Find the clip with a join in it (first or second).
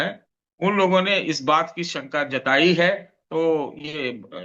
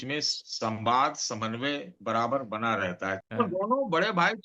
second